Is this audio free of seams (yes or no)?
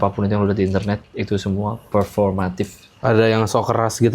no